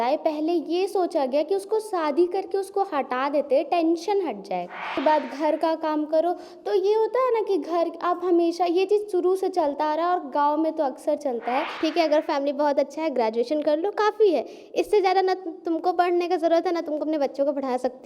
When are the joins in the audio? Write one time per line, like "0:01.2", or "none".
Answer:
0:04.9
0:11.7